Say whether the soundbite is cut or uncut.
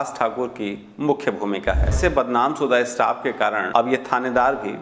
cut